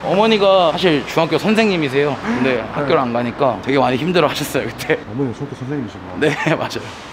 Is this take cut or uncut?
uncut